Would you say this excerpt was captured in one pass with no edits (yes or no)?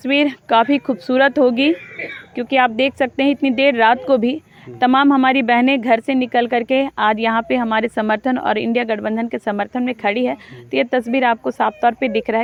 yes